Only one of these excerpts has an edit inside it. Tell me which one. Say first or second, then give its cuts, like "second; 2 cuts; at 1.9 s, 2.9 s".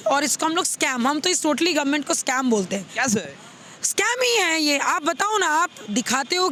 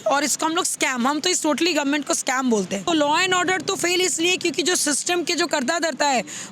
second; 1 cut; at 2.9 s